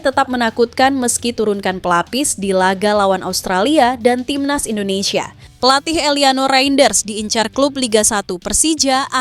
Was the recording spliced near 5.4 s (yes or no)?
yes